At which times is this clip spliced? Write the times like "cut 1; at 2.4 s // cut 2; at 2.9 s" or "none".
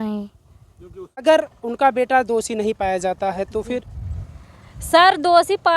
cut 1; at 1.2 s